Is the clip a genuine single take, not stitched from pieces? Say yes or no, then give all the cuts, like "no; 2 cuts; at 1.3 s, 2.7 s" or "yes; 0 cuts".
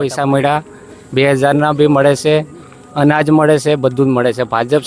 yes; 0 cuts